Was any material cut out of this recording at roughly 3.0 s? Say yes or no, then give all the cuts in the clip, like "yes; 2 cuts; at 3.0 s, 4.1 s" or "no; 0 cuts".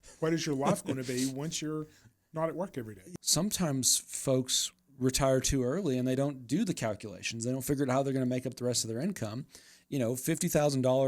yes; 1 cut; at 3.0 s